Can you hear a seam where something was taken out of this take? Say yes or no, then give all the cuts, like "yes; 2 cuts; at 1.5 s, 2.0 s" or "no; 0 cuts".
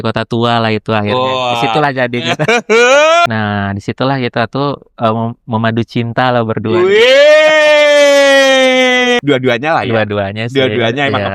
yes; 2 cuts; at 3.3 s, 9.2 s